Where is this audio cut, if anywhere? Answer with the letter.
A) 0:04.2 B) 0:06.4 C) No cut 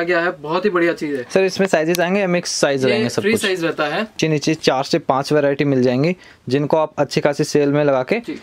A